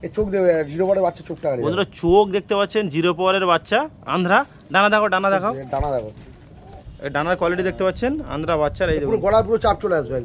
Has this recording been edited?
no; 0 cuts

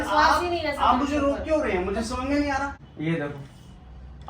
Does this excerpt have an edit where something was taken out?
yes; 1 cut; at 2.8 s

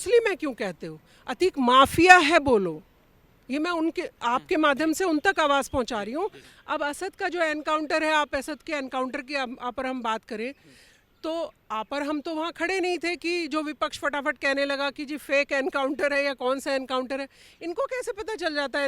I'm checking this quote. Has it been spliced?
yes; 1 cut; at 6.5 s

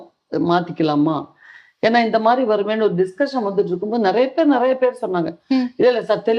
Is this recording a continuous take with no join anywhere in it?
yes; 0 cuts

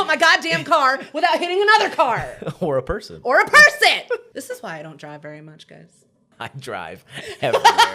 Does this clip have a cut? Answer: yes; 2 cuts; at 4.3 s, 6.3 s

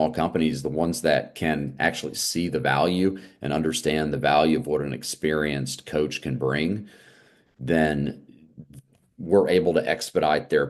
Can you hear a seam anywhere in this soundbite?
no; 0 cuts

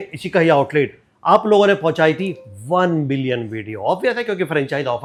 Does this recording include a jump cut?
no; 0 cuts

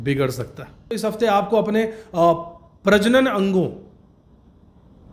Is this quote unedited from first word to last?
no; 1 cut; at 1.0 s

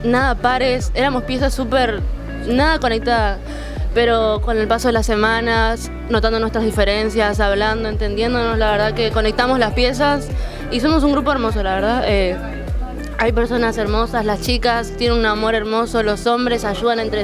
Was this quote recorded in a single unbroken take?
yes; 0 cuts

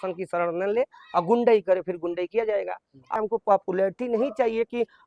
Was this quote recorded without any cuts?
no; 1 cut; at 3.2 s

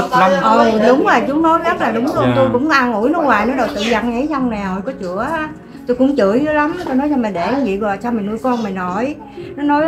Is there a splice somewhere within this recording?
no; 0 cuts

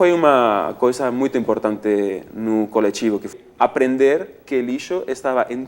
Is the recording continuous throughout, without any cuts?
no; 1 cut; at 3.3 s

